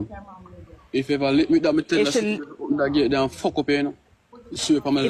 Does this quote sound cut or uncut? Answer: uncut